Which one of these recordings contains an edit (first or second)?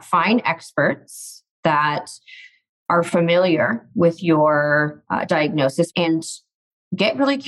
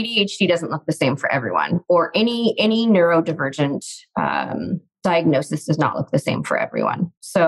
first